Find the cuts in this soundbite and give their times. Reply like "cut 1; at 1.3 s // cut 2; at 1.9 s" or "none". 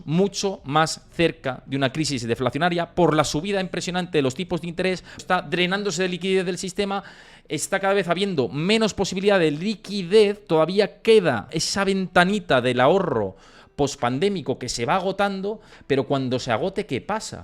cut 1; at 5.2 s // cut 2; at 11.6 s